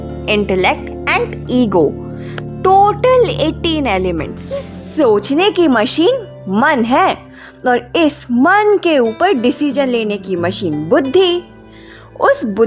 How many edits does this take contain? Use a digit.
1